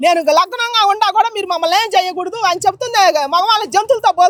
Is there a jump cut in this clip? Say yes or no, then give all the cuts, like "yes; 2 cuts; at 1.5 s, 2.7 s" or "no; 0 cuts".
no; 0 cuts